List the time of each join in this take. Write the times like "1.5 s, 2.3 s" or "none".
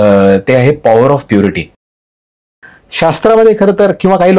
2.2 s